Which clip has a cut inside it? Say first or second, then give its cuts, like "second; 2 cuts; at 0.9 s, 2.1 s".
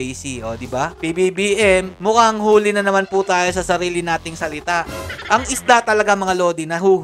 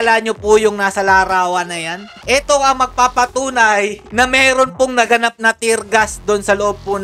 first; 2 cuts; at 0.9 s, 5.1 s